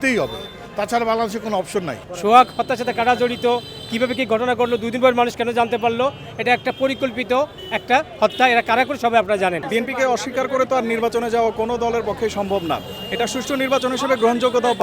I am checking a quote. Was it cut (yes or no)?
yes